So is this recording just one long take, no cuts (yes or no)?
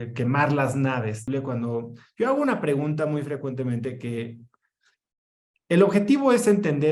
no